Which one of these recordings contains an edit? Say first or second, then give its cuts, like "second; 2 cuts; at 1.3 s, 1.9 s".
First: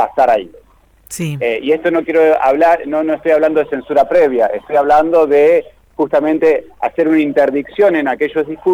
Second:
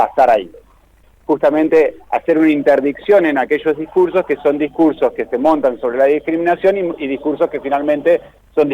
second; 1 cut; at 1.1 s